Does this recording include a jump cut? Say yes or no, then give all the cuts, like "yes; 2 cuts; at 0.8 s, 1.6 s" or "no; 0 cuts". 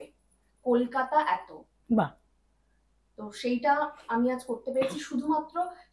no; 0 cuts